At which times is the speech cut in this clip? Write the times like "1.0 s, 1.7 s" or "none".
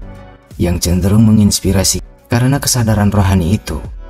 2.0 s